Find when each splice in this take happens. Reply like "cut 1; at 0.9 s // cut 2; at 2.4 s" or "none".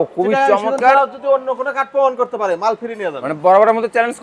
none

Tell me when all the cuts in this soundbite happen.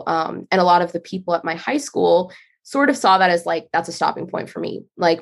none

